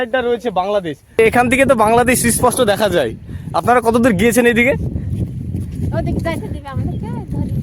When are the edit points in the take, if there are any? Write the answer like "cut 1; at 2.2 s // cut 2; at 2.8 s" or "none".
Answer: cut 1; at 1.2 s